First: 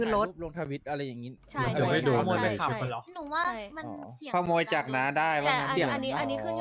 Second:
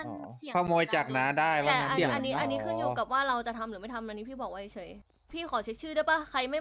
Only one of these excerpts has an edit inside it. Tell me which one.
second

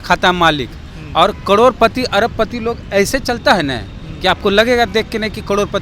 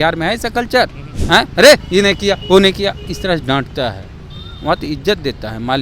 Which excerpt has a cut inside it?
second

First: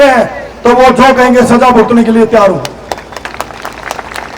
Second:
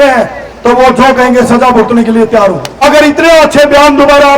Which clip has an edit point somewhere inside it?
second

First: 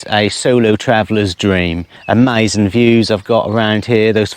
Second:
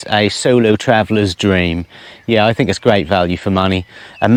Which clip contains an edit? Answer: first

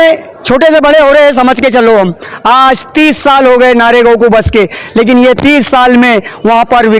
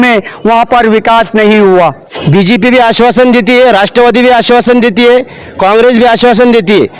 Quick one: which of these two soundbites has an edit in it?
second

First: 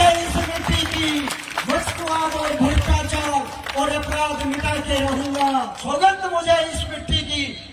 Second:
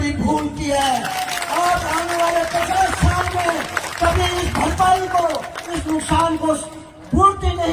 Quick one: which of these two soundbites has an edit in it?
first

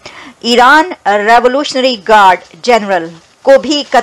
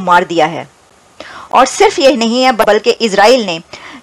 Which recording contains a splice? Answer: second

